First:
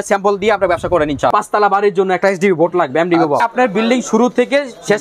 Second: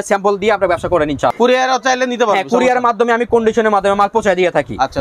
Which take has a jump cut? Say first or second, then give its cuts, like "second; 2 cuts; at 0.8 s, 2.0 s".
first; 2 cuts; at 1.3 s, 3.5 s